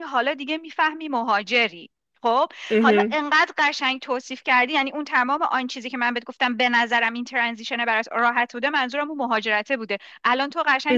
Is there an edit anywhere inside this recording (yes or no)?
no